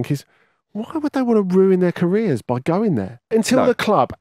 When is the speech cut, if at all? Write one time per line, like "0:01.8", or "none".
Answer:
0:03.3